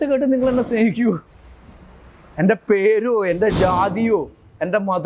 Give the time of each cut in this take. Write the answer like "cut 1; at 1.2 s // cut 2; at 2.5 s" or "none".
none